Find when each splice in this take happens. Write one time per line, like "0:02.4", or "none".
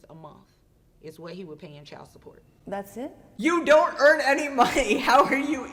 none